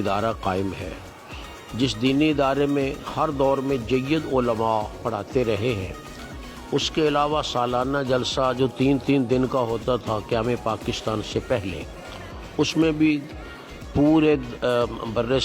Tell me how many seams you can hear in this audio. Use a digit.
0